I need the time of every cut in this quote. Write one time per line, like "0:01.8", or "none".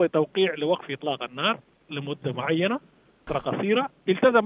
0:03.3